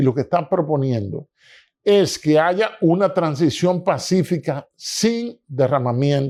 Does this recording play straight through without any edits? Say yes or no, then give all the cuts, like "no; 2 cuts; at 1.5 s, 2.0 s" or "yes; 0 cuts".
yes; 0 cuts